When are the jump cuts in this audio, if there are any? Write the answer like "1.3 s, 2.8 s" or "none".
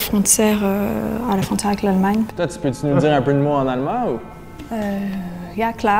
2.3 s